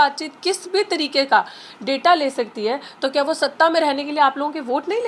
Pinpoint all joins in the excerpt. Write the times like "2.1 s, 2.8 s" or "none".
none